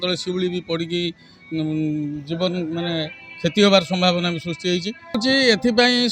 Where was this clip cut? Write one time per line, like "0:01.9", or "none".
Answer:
0:05.2